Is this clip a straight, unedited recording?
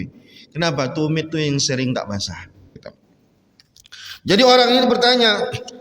no; 1 cut; at 2.8 s

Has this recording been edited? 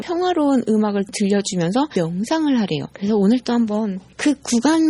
yes; 1 cut; at 2.8 s

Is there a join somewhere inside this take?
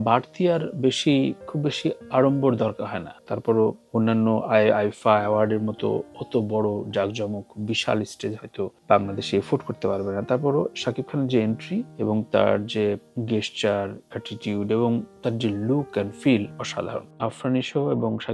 yes; 1 cut; at 17.1 s

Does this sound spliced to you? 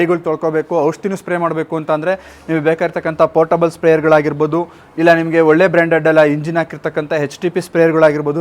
no; 0 cuts

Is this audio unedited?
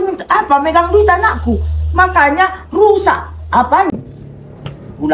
no; 1 cut; at 3.9 s

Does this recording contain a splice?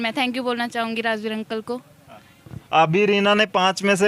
no; 0 cuts

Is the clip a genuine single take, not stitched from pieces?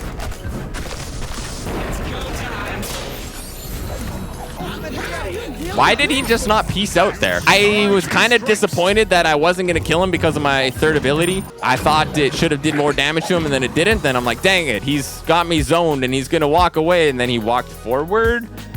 no; 2 cuts; at 7.4 s, 11.5 s

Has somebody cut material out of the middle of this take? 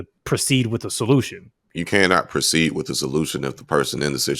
yes; 1 cut; at 1.7 s

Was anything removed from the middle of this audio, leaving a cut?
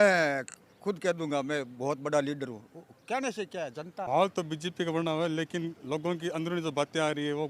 yes; 1 cut; at 4.1 s

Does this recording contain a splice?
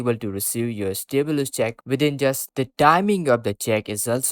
yes; 1 cut; at 2.4 s

